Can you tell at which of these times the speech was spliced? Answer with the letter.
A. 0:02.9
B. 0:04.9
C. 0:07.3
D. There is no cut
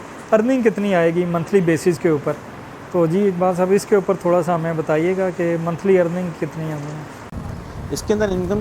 C